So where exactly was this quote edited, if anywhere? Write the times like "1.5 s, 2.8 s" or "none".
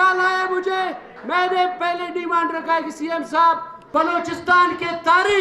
3.7 s